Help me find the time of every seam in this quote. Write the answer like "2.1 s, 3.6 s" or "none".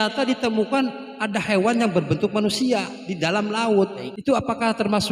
4.1 s